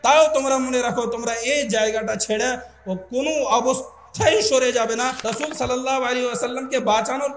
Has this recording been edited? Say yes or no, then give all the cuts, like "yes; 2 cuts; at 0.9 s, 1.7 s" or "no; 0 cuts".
yes; 1 cut; at 5.2 s